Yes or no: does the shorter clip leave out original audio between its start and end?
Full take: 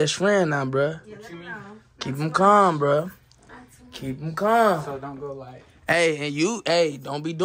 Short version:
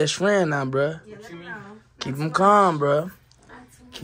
no